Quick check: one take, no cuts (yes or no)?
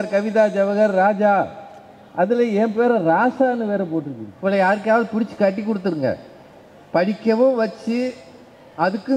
no